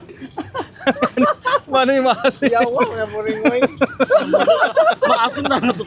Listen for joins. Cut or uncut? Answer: uncut